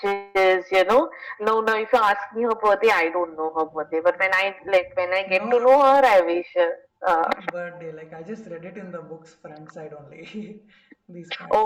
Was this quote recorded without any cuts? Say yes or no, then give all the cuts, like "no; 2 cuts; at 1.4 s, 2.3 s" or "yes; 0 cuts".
yes; 0 cuts